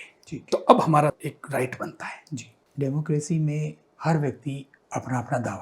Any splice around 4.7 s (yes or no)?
yes